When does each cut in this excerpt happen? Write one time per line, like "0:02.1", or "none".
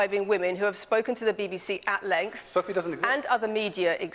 none